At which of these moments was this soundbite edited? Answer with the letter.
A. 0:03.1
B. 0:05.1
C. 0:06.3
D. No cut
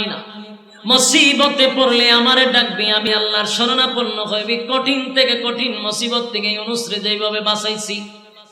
A